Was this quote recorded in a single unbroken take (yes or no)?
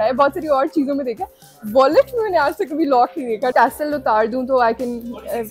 no